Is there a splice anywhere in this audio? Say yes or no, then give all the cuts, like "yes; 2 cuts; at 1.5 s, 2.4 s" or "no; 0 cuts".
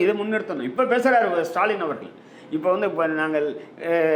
no; 0 cuts